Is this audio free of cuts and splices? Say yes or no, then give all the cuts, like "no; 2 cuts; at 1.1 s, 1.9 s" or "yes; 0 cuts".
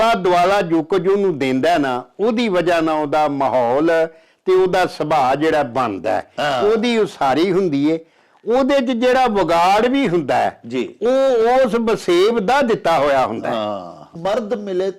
no; 1 cut; at 14.1 s